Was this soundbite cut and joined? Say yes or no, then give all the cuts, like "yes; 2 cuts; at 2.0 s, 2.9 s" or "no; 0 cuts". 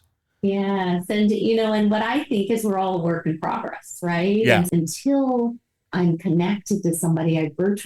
yes; 1 cut; at 4.7 s